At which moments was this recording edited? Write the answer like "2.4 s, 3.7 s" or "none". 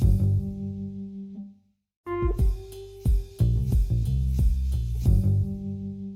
1.9 s